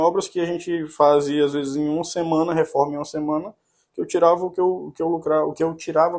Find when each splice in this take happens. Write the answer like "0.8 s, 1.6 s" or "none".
none